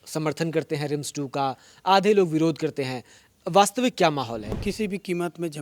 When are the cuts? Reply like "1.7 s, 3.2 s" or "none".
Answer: 4.6 s